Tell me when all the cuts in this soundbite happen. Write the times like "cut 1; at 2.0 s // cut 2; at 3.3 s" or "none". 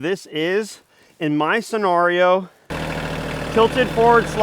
cut 1; at 2.7 s